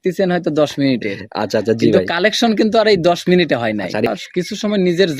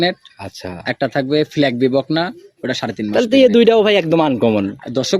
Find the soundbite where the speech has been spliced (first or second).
first